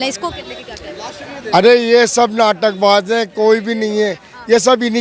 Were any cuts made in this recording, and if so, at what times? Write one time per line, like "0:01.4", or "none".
none